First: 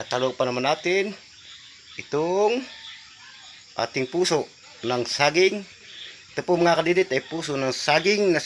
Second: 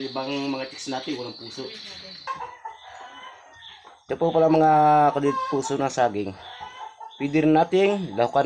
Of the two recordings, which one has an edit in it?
second; 1 cut; at 2.3 s

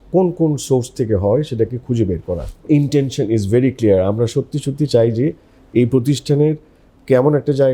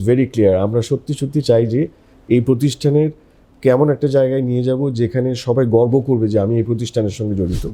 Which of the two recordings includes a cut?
first; 1 cut; at 2.5 s

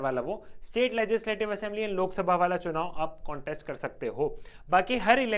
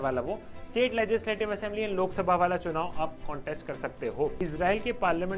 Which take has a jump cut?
second; 1 cut; at 4.4 s

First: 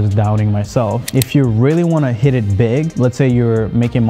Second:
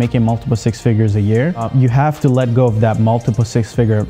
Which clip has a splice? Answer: first; 2 cuts; at 1.1 s, 2.9 s

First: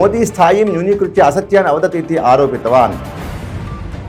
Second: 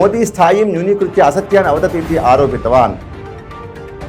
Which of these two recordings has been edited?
second; 1 cut; at 3.0 s

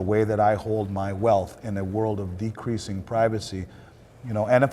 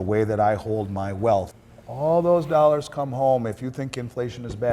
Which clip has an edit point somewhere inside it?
second; 1 cut; at 1.6 s

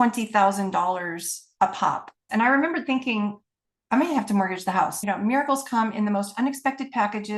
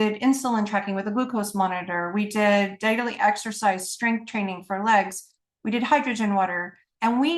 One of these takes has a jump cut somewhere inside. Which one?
first; 2 cuts; at 2.2 s, 5.0 s

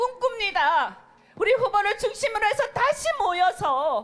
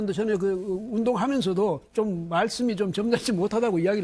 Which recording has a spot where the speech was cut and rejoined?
first; 1 cut; at 1.7 s

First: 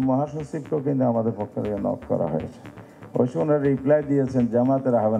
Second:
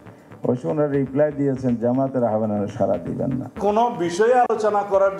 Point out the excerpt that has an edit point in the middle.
second; 1 cut; at 3.6 s

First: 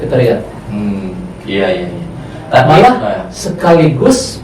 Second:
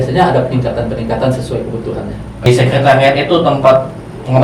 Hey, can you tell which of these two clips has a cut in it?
second; 1 cut; at 2.5 s

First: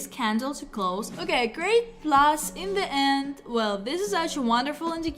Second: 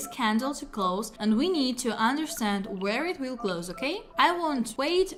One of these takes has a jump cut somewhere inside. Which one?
first; 1 cut; at 1.1 s

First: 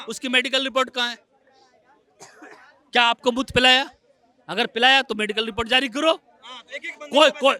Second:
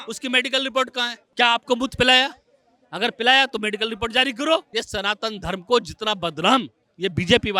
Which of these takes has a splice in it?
second; 2 cuts; at 1.2 s, 4.7 s

